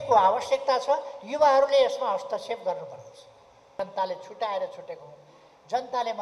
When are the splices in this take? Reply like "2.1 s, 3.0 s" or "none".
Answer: 3.8 s